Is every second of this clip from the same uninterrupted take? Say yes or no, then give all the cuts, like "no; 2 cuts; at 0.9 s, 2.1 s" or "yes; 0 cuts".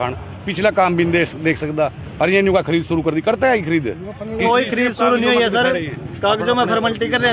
no; 1 cut; at 4.4 s